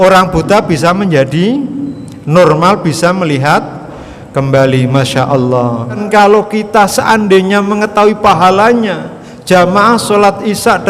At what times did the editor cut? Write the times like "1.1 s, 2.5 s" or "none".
6.0 s

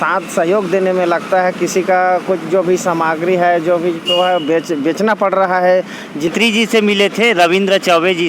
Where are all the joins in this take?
6.3 s

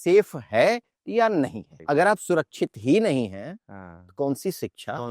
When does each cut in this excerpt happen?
1.7 s

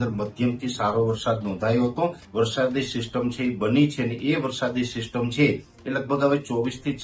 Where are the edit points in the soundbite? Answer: 2.2 s

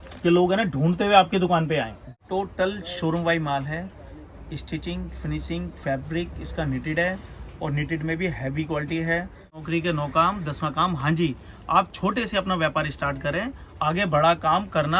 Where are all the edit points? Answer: 2.1 s, 9.6 s

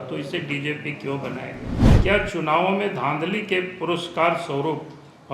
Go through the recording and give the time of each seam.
1.8 s

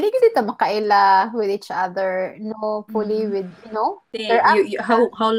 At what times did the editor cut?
4.1 s

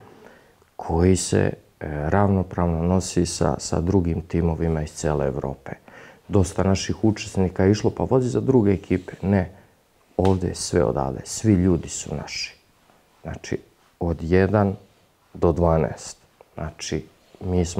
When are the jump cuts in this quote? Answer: none

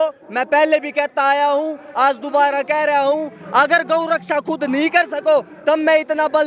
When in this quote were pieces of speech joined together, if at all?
none

